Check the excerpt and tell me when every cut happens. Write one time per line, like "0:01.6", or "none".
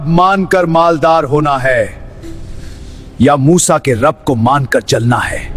none